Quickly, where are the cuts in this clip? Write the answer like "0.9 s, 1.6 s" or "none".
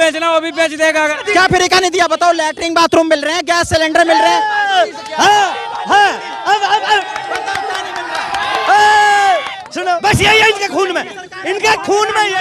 1.2 s, 10.0 s

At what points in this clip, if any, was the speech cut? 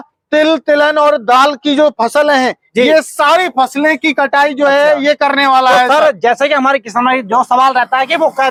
none

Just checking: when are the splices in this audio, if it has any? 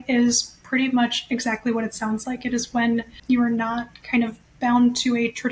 3.2 s

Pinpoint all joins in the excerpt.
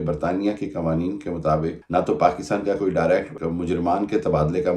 1.8 s, 3.3 s

